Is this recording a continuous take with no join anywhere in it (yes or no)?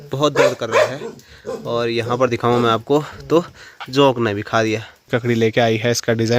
no